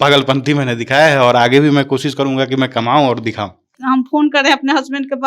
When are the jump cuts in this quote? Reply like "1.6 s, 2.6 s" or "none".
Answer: 3.8 s